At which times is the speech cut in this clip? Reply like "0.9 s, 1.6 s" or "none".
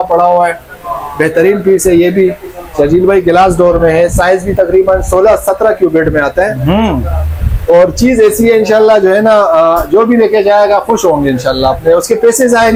none